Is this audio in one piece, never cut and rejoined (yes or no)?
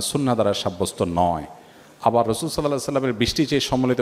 yes